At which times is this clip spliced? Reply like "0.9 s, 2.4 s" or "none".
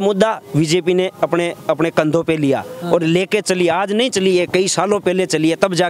none